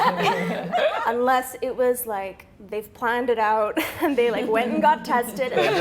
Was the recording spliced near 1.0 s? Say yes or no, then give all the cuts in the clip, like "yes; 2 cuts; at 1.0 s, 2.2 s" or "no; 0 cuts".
yes; 1 cut; at 1.0 s